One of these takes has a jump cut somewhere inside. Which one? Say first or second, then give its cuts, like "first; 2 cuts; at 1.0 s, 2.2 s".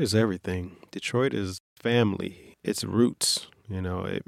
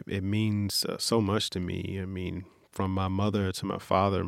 first; 2 cuts; at 1.6 s, 2.5 s